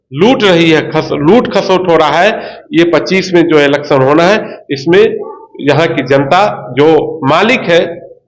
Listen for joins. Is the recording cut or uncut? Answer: uncut